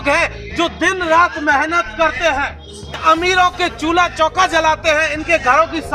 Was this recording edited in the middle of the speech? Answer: yes; 1 cut; at 3.0 s

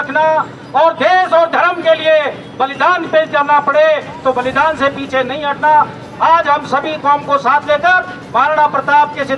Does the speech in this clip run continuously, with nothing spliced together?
yes; 0 cuts

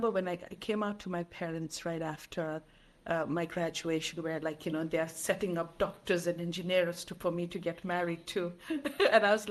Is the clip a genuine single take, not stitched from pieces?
yes; 0 cuts

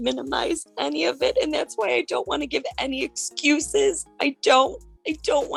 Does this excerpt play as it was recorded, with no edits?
yes; 0 cuts

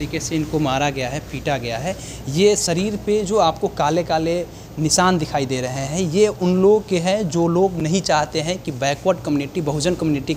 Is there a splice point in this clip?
no; 0 cuts

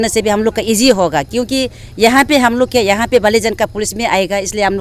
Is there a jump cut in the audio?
no; 0 cuts

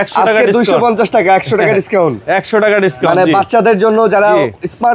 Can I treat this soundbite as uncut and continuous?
yes; 0 cuts

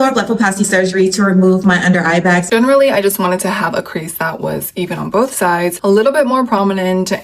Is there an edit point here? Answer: yes; 2 cuts; at 2.4 s, 5.8 s

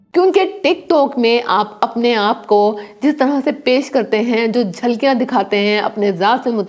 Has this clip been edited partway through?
no; 0 cuts

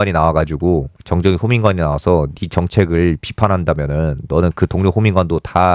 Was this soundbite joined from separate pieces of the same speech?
no; 0 cuts

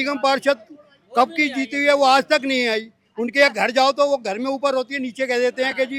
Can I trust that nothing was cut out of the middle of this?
yes; 0 cuts

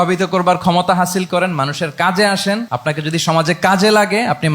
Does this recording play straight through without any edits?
no; 1 cut; at 2.7 s

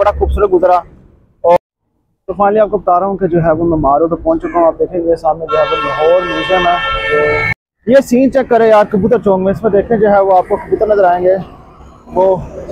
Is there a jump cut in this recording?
yes; 2 cuts; at 1.6 s, 7.5 s

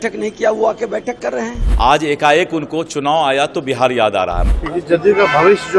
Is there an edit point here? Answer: yes; 2 cuts; at 1.6 s, 4.5 s

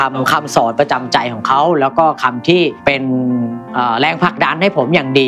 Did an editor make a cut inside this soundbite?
no; 0 cuts

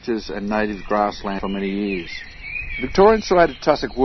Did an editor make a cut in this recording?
yes; 1 cut; at 1.4 s

